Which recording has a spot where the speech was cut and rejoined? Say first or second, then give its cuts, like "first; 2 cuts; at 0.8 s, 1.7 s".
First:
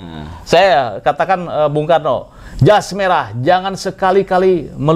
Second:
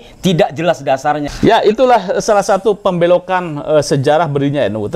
second; 1 cut; at 1.3 s